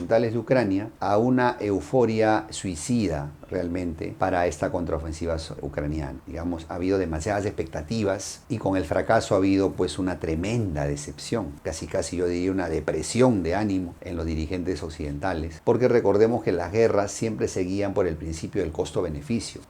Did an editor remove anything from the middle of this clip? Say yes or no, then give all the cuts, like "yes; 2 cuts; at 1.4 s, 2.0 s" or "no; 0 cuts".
no; 0 cuts